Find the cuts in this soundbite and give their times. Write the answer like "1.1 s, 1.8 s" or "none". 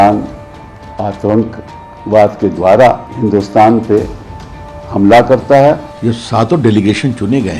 3.1 s, 5.9 s